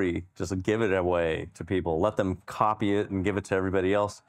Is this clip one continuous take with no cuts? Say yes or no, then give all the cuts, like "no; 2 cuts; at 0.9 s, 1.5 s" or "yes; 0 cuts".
yes; 0 cuts